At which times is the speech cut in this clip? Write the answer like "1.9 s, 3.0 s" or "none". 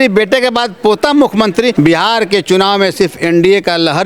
1.7 s